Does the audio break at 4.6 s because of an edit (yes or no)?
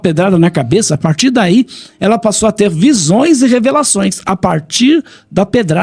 no